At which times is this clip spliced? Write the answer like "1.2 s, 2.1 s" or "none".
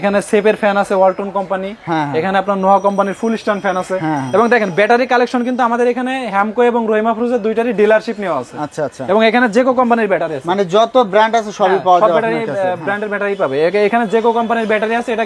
none

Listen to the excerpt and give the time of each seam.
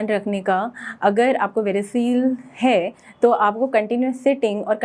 none

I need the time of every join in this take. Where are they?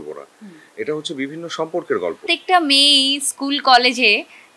2.2 s

